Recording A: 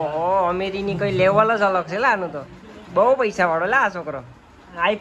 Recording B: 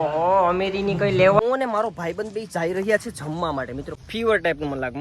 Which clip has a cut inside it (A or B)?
B